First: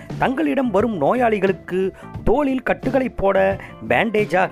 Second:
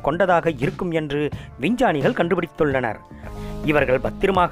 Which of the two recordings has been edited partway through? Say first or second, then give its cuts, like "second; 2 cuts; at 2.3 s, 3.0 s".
second; 1 cut; at 3.3 s